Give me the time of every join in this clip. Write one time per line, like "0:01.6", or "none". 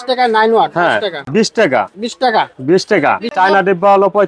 0:01.2
0:03.3